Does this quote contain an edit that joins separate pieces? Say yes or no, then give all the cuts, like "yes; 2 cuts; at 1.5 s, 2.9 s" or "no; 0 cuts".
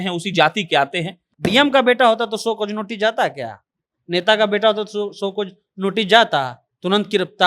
yes; 1 cut; at 1.2 s